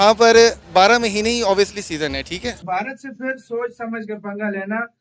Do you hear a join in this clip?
yes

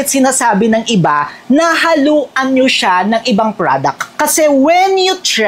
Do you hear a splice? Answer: no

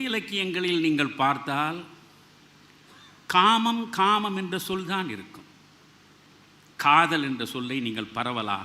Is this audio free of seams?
yes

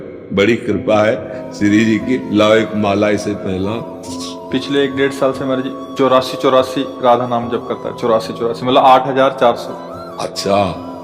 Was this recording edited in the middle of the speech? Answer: yes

